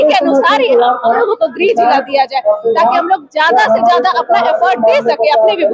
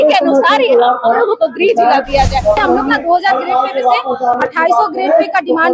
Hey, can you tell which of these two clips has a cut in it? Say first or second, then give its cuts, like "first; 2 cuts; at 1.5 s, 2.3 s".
second; 1 cut; at 2.6 s